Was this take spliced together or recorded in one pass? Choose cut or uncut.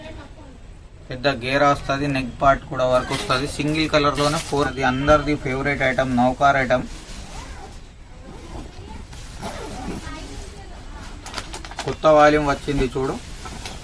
cut